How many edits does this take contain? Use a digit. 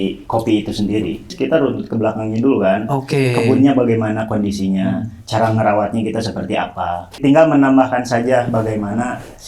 2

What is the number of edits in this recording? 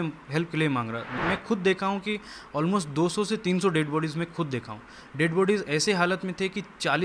1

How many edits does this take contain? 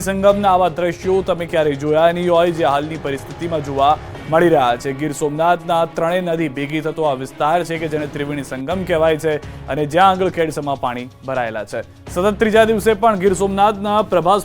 1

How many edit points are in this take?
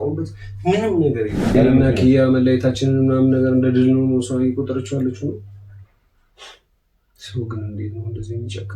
1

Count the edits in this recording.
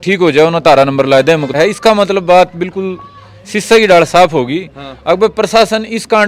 1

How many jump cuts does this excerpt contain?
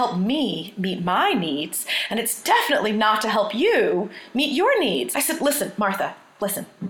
1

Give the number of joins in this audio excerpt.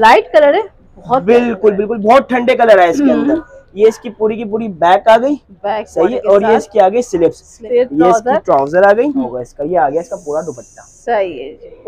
2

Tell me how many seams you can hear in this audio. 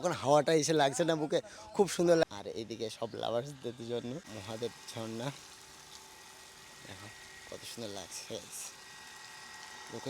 2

